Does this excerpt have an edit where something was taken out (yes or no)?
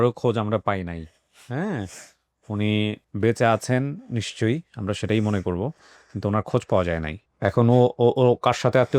yes